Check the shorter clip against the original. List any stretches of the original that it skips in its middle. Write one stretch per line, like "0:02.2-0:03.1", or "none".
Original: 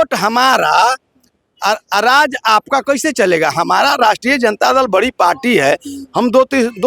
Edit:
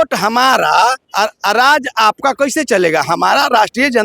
0:01.0-0:01.5